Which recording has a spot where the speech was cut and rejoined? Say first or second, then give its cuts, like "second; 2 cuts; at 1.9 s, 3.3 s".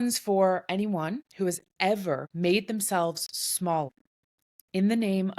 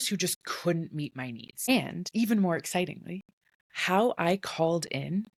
first; 3 cuts; at 1.2 s, 2.3 s, 3.9 s